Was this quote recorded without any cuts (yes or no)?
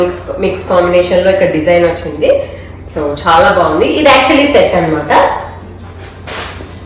yes